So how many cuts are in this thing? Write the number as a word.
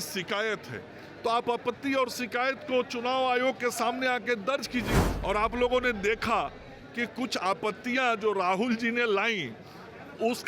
one